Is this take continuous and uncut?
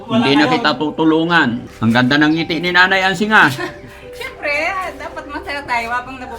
no; 1 cut; at 1.7 s

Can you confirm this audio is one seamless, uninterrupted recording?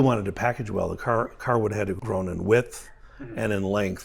no; 1 cut; at 2.0 s

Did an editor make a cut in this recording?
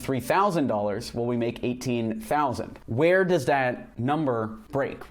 no; 0 cuts

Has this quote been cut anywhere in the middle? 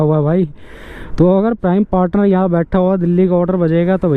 no; 0 cuts

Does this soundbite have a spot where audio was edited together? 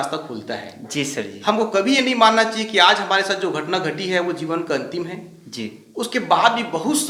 no; 0 cuts

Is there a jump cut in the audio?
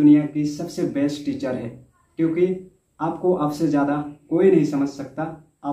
no; 0 cuts

